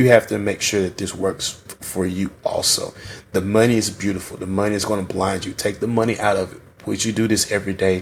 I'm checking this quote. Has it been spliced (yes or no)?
no